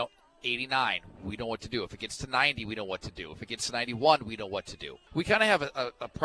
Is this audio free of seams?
no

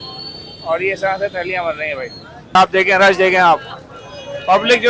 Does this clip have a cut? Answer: yes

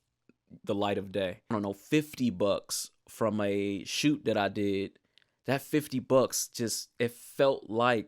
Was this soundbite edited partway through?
yes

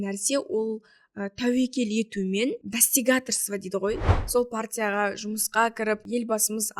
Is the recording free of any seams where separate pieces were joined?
no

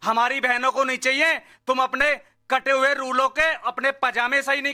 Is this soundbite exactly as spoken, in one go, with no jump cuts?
yes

